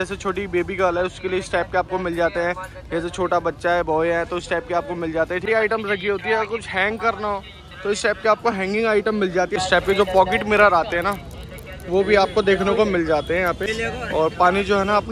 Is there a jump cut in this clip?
yes; 3 cuts; at 5.5 s, 9.6 s, 13.6 s

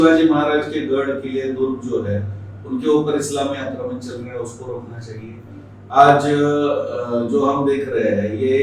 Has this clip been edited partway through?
no; 0 cuts

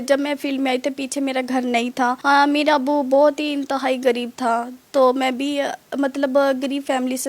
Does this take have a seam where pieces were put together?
no; 0 cuts

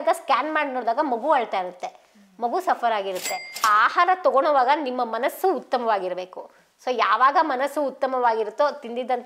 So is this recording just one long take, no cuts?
no; 1 cut; at 3.7 s

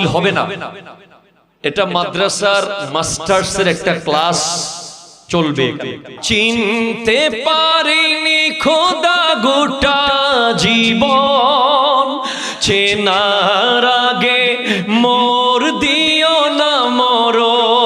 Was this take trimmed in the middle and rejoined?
yes; 1 cut; at 6.1 s

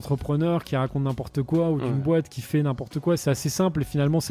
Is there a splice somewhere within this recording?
no; 0 cuts

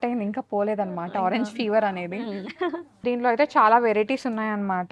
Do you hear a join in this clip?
yes; 1 cut; at 3.0 s

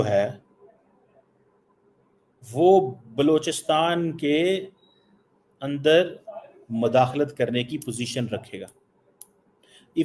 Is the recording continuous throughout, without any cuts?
yes; 0 cuts

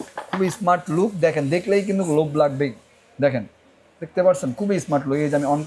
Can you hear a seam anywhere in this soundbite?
no; 0 cuts

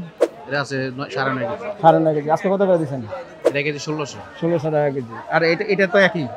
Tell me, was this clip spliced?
no; 0 cuts

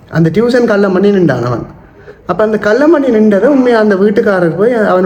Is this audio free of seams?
yes; 0 cuts

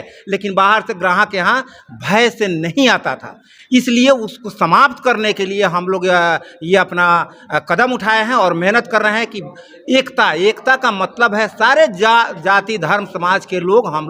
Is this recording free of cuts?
yes; 0 cuts

